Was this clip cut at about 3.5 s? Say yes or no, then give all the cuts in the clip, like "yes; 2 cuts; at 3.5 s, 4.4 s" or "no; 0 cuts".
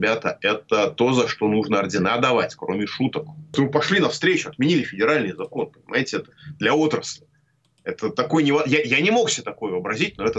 yes; 1 cut; at 3.5 s